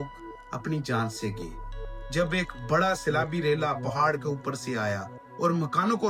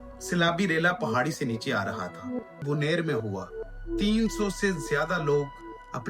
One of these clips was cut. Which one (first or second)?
second